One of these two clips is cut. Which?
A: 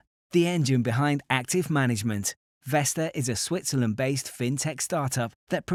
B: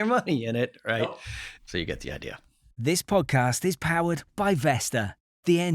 B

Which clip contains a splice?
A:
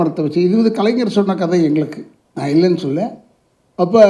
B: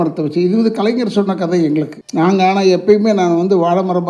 B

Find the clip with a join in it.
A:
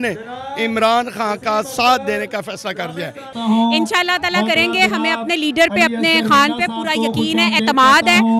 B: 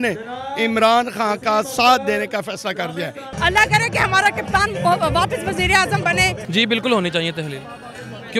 B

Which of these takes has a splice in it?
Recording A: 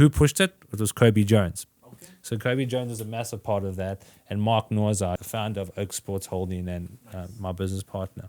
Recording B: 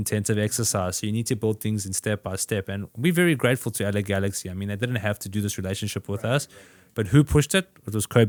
A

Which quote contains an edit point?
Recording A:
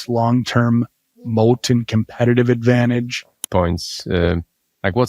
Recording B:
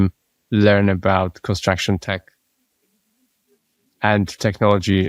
A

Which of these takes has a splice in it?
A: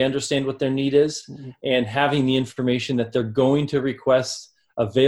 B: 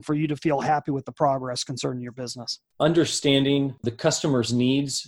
B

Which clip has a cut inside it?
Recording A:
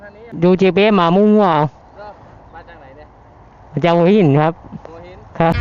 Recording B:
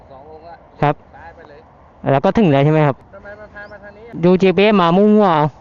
B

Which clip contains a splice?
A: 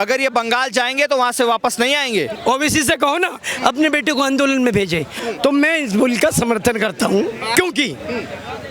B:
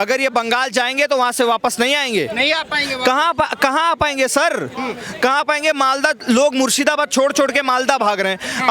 A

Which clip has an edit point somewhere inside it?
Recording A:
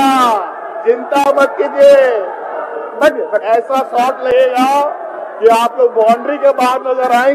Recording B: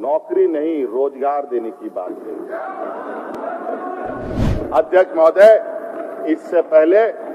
B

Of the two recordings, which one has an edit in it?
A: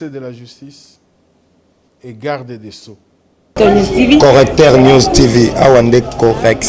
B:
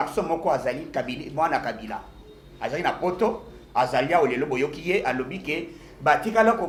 A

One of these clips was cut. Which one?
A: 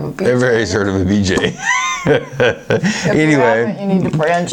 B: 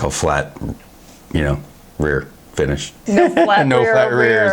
B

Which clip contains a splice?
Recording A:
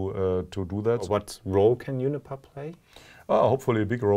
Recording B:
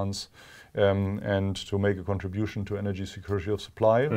A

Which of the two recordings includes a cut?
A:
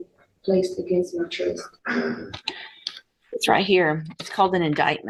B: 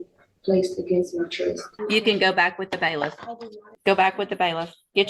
B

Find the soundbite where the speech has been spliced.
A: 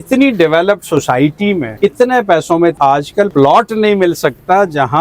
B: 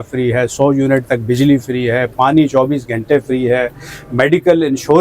A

